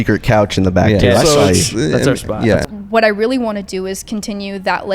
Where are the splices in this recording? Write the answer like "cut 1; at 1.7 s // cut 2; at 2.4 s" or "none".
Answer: cut 1; at 2.6 s